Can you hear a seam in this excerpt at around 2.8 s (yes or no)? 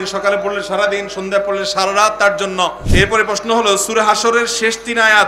yes